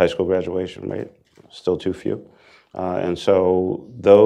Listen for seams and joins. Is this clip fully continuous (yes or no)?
yes